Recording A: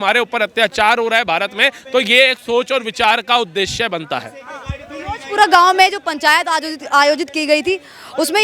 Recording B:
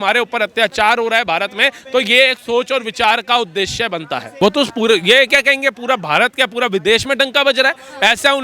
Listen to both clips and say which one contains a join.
B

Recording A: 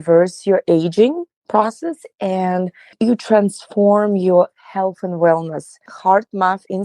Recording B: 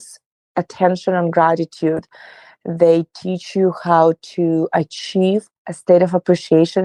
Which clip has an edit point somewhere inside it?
A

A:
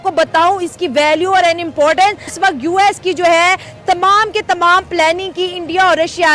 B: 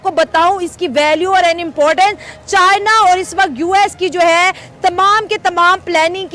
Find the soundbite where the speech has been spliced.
A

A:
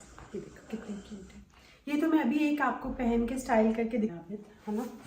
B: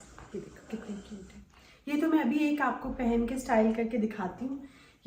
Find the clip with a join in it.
A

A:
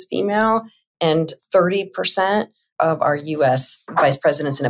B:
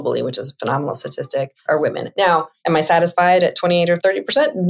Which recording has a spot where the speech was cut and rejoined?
B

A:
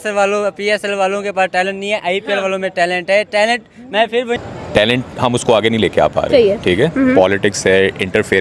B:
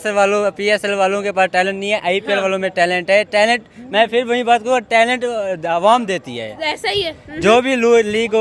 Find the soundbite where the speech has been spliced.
A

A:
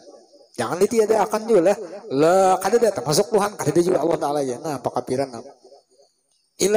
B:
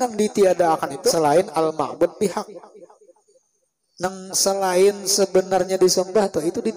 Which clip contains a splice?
B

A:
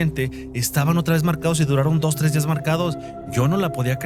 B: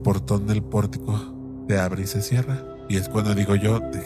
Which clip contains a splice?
B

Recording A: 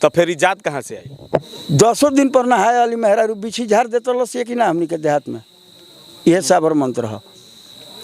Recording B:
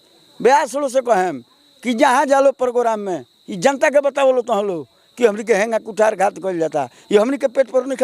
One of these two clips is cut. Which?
A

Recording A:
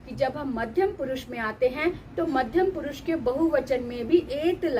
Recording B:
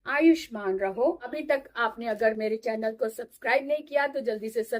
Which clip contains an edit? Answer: B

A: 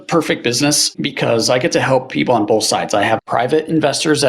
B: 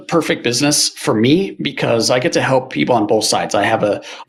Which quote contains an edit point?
A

